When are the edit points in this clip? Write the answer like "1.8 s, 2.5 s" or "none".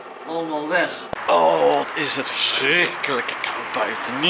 1.0 s